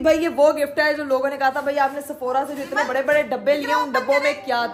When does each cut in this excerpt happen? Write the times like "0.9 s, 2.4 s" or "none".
none